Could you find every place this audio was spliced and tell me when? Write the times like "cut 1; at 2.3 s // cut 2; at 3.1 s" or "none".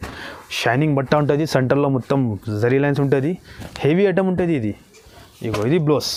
none